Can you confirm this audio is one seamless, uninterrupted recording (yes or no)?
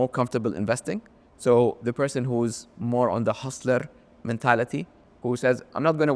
yes